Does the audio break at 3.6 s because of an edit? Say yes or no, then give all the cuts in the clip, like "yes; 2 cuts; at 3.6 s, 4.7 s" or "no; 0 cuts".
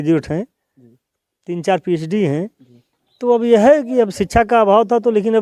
no; 0 cuts